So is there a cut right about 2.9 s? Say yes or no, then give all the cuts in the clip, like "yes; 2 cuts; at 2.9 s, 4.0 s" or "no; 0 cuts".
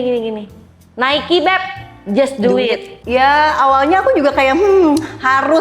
yes; 1 cut; at 2.9 s